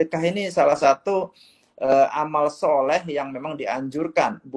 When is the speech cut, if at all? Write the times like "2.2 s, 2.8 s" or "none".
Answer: none